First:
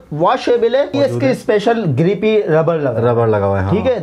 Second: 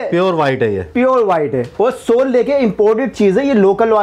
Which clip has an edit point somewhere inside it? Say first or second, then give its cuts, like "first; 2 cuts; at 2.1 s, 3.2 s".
first; 1 cut; at 0.9 s